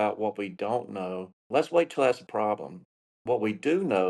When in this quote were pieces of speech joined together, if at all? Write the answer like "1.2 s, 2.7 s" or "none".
1.3 s